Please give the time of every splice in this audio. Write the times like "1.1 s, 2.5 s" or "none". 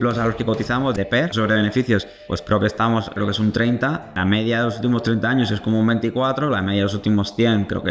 1.0 s, 2.3 s, 3.2 s, 4.2 s